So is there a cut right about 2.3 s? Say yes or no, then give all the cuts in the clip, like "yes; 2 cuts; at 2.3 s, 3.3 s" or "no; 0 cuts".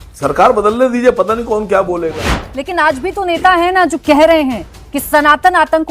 yes; 1 cut; at 2.3 s